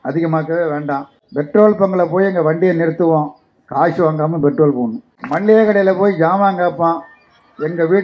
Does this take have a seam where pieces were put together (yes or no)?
yes